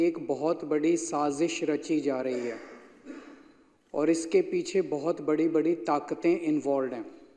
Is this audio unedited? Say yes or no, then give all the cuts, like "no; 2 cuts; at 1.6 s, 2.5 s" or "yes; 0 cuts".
yes; 0 cuts